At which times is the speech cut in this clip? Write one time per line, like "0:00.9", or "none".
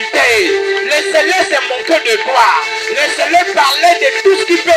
none